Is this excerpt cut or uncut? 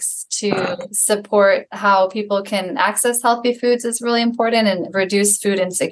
cut